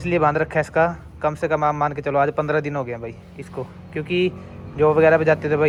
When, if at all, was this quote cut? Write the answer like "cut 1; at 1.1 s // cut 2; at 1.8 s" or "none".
none